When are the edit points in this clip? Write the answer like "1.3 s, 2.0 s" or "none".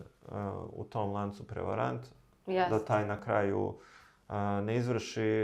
none